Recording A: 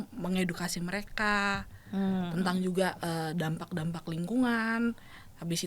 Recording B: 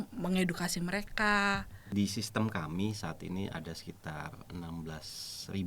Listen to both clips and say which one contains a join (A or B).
B